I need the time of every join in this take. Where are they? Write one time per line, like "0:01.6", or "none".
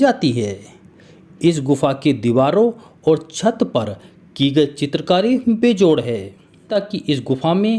0:06.7